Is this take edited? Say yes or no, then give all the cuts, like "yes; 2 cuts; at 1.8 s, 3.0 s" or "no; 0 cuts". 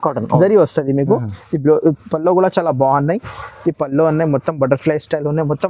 no; 0 cuts